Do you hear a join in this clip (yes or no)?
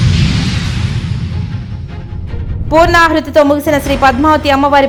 no